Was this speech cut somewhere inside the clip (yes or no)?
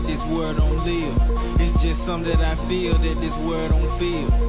no